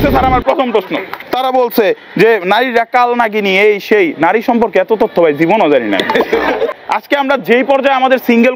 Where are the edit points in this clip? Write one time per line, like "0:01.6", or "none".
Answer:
0:01.1
0:06.7